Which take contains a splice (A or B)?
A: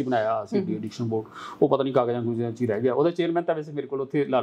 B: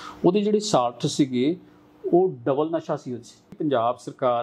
B